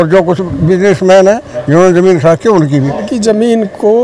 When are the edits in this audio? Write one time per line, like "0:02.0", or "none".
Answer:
0:03.1